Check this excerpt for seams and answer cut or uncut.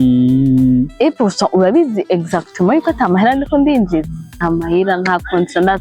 cut